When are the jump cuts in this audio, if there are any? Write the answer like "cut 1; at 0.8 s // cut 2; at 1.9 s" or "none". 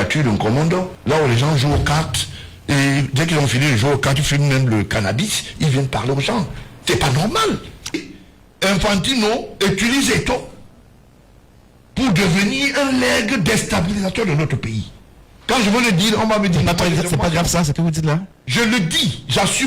cut 1; at 0.9 s // cut 2; at 7.9 s